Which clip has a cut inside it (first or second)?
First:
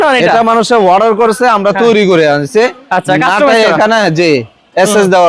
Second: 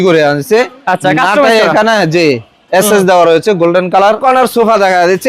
second